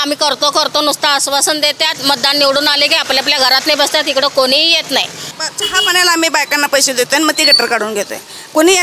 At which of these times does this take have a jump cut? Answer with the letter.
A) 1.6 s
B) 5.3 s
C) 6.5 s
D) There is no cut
B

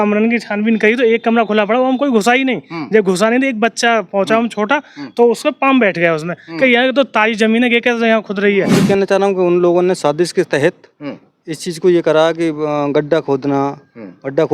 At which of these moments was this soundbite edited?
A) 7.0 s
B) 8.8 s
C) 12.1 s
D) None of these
B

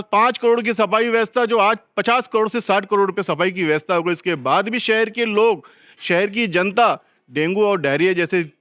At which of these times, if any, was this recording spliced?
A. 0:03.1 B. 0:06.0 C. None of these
C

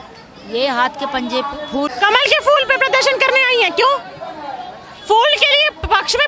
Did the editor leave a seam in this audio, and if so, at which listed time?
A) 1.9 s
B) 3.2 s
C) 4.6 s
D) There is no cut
A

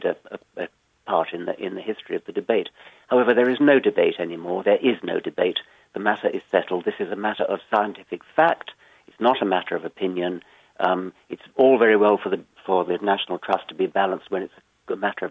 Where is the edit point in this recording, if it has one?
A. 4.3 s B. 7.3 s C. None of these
A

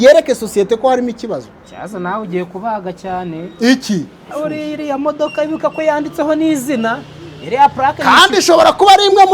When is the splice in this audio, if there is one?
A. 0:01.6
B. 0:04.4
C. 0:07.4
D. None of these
B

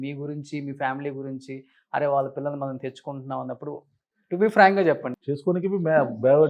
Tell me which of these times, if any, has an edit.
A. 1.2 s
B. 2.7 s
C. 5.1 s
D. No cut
C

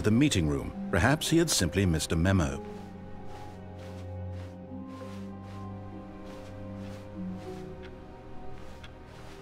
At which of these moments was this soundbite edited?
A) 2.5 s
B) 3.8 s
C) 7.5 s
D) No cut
D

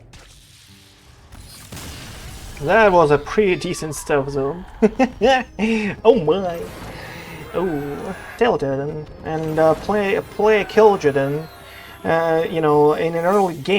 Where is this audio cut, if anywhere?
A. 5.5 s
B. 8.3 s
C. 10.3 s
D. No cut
B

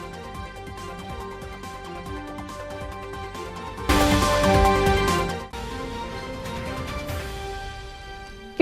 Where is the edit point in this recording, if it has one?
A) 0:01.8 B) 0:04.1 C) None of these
A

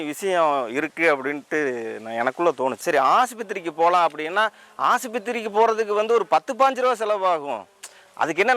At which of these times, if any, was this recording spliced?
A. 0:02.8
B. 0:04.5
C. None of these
A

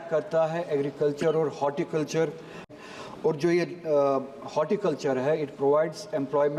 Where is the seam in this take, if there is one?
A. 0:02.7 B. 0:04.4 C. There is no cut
A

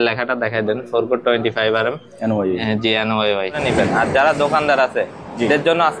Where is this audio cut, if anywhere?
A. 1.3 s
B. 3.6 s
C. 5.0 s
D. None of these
B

